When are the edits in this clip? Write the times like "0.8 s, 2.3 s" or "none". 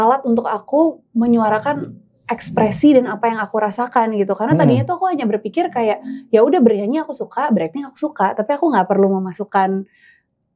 none